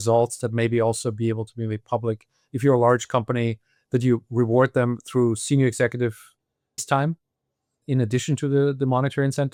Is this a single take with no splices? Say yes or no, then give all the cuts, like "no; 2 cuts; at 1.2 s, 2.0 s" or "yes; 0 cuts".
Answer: yes; 0 cuts